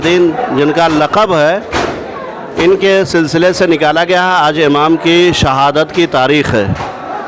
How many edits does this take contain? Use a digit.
0